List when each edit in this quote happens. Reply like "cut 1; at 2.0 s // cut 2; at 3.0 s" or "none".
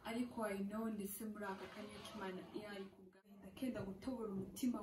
cut 1; at 3.4 s